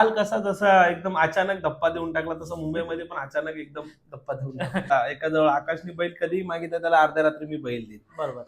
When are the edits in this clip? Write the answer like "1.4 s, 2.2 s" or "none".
4.9 s